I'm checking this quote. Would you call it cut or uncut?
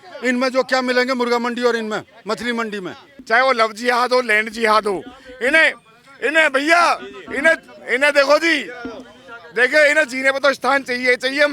cut